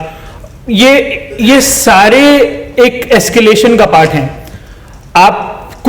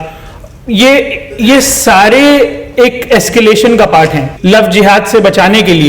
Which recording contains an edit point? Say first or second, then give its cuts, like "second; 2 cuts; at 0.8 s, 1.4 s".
second; 1 cut; at 4.3 s